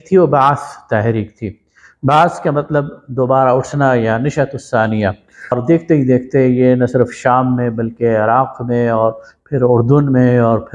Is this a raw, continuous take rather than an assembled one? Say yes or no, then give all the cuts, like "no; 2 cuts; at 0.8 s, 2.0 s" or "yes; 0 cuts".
no; 1 cut; at 5.5 s